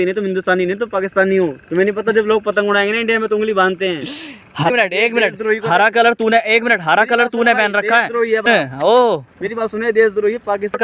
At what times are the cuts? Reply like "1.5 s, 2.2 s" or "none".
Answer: none

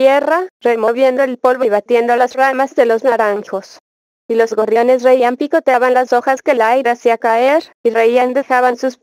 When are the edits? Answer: 5.0 s, 7.9 s

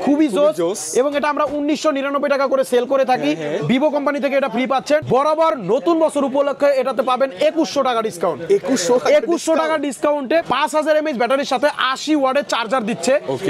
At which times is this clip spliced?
5.0 s, 10.5 s

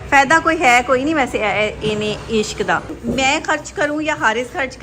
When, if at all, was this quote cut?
2.9 s

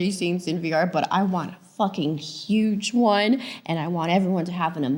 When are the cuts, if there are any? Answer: none

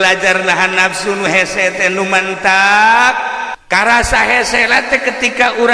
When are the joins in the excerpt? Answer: 3.6 s

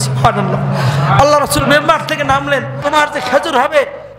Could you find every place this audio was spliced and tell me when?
2.8 s

